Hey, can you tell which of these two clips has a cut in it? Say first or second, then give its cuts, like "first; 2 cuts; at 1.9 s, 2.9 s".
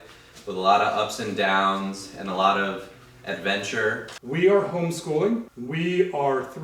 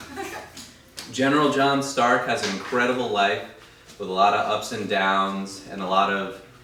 first; 2 cuts; at 4.1 s, 5.6 s